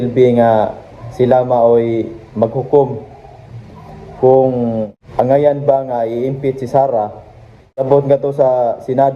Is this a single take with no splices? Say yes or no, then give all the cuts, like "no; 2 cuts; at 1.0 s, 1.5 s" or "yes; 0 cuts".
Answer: no; 2 cuts; at 5.0 s, 7.8 s